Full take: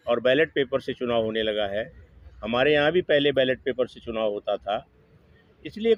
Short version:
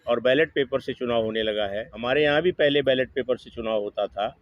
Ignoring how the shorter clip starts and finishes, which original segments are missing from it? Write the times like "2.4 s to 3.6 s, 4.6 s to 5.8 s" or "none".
1.9 s to 2.4 s